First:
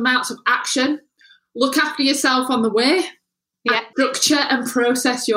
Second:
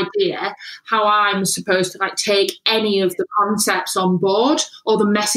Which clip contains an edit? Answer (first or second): first